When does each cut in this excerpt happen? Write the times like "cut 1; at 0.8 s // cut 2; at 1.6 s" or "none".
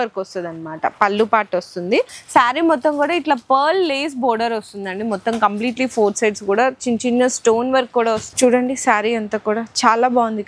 cut 1; at 2.2 s // cut 2; at 8.3 s